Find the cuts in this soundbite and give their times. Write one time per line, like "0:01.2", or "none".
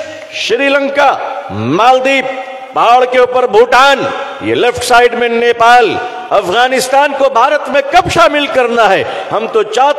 none